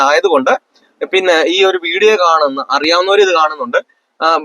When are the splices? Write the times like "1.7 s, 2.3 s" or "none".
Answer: none